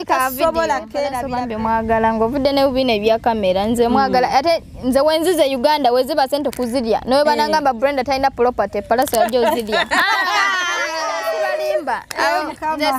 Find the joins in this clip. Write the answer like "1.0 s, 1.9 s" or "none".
1.3 s, 11.0 s

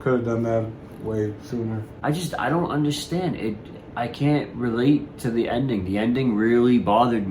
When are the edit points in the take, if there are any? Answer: 1.9 s

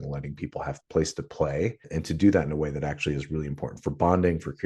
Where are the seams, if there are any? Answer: 1.8 s

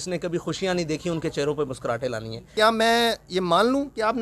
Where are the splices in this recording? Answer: 2.5 s

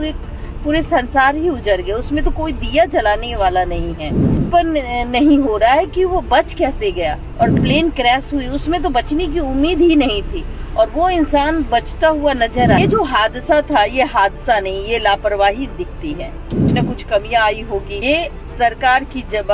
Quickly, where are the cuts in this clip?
4.4 s, 7.5 s, 12.8 s, 16.6 s

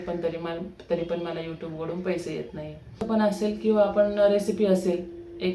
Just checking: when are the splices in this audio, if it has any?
3.0 s

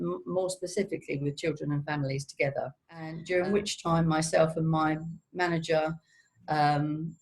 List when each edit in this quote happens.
3.2 s

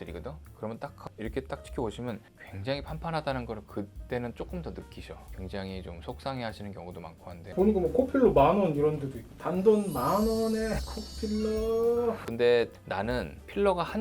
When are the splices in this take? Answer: 7.5 s, 12.2 s

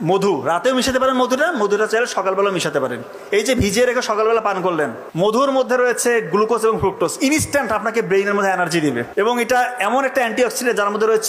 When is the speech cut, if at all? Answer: 5.4 s, 9.1 s

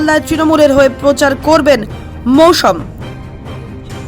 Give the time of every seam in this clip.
2.8 s

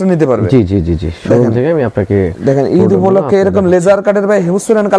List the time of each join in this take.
none

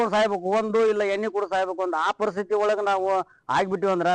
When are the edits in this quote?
none

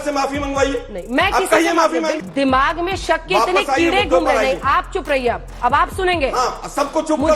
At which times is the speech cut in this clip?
2.2 s

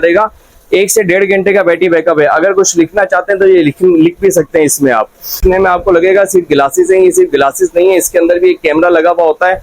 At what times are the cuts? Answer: 5.4 s

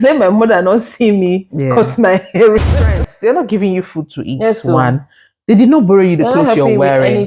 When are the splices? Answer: 2.7 s

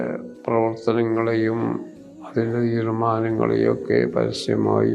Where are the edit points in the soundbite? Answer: none

